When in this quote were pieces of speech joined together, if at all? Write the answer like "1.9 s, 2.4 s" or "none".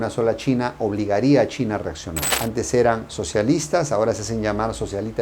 2.2 s

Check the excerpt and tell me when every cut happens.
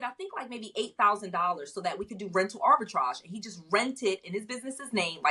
none

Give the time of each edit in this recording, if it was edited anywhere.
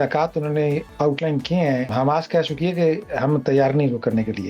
0.9 s, 1.9 s

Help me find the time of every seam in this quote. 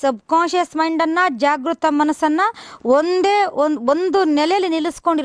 none

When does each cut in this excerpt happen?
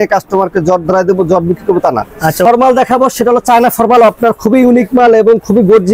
2.4 s

